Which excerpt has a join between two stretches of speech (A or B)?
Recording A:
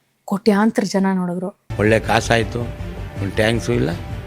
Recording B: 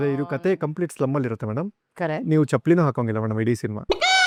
A